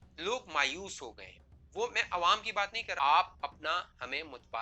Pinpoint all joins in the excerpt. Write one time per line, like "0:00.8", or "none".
0:02.8